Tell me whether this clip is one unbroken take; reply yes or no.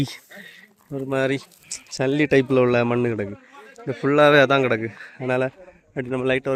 yes